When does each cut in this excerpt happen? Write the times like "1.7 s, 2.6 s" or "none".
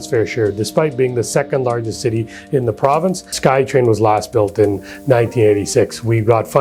3.3 s